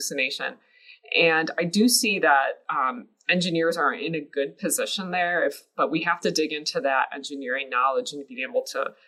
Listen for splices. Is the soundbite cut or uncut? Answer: uncut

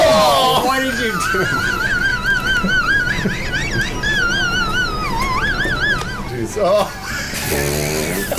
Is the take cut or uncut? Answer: cut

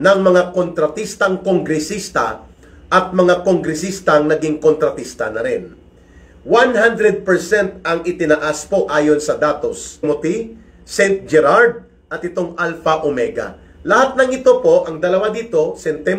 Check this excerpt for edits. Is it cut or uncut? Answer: cut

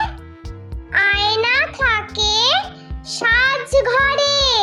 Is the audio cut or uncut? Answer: uncut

